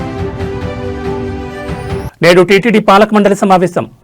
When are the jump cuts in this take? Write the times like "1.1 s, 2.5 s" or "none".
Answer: 2.0 s